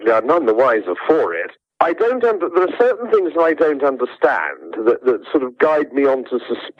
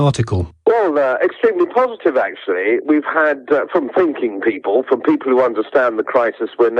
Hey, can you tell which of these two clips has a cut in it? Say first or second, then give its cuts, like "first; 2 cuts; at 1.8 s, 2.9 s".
second; 1 cut; at 1.8 s